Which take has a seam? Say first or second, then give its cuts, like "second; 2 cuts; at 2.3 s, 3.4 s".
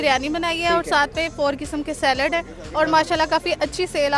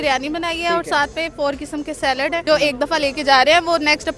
second; 1 cut; at 2.4 s